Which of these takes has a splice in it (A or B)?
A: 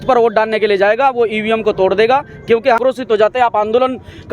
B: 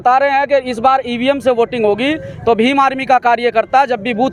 A